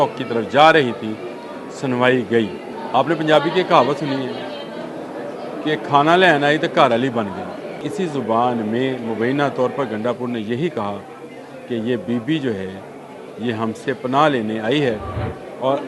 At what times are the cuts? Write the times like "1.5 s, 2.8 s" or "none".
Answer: 2.7 s, 7.8 s